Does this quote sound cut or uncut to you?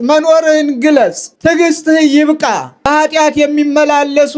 cut